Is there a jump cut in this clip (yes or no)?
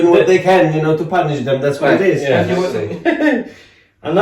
yes